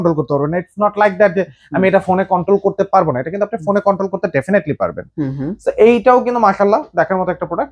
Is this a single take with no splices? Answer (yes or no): yes